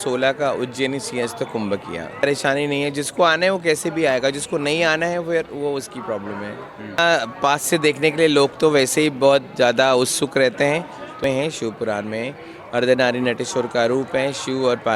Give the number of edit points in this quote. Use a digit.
3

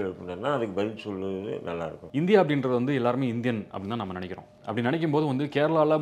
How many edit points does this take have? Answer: 2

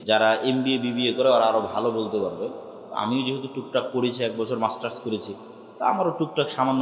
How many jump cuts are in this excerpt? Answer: 0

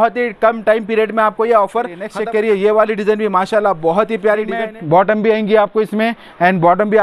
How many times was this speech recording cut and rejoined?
2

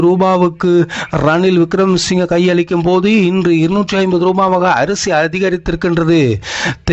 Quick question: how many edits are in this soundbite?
0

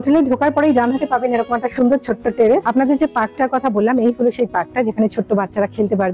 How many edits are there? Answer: 1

